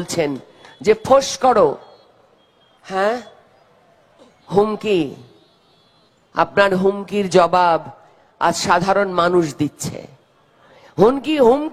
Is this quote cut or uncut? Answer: uncut